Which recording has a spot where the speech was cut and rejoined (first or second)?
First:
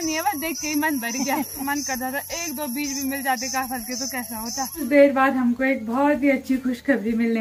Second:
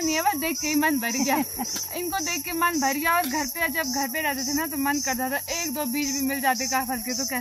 first